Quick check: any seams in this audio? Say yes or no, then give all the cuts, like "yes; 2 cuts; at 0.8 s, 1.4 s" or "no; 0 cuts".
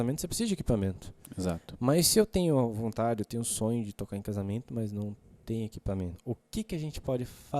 yes; 1 cut; at 6.2 s